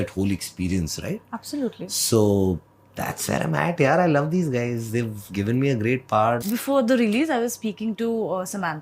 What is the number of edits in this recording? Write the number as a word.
one